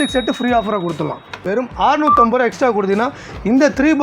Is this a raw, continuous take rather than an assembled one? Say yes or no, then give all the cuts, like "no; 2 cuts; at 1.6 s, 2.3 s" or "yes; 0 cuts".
no; 1 cut; at 1.4 s